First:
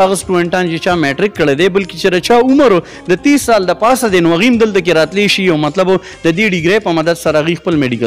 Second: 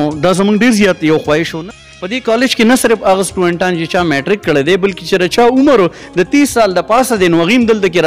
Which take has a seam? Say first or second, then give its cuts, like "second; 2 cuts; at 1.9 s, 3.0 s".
second; 1 cut; at 1.6 s